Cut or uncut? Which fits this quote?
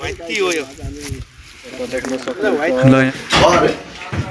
cut